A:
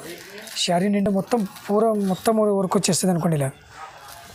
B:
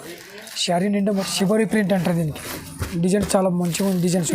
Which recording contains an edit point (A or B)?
B